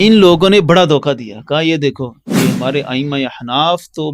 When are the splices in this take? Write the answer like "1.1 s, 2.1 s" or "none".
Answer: none